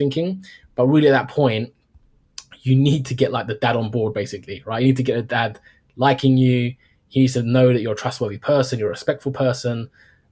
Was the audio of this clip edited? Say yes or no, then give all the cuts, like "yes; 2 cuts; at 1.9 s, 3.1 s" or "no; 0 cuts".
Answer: no; 0 cuts